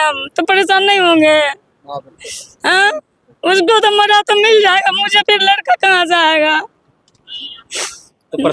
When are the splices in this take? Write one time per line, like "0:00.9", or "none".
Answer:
none

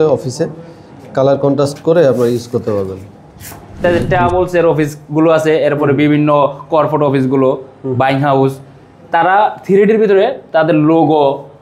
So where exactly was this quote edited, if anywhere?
0:03.8

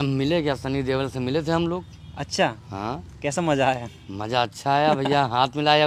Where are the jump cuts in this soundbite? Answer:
none

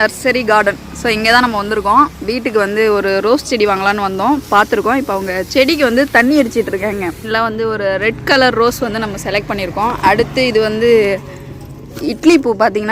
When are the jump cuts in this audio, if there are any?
0:07.2

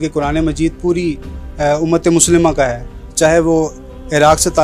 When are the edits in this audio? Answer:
none

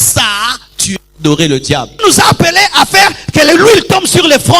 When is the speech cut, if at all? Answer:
0:02.0

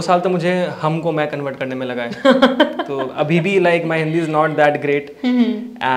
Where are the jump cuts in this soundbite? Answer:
none

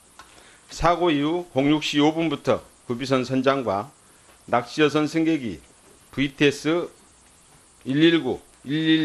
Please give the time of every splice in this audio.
0:02.4

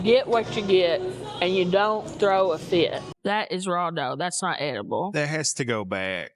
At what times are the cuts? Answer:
0:03.1

